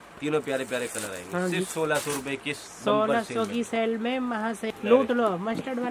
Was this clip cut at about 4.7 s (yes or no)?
yes